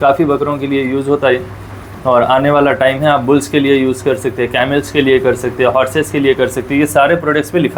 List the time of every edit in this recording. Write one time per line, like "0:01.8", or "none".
none